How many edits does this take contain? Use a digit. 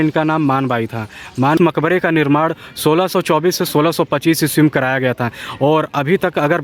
1